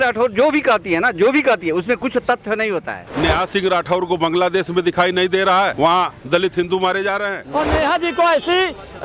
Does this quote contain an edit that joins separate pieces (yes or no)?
yes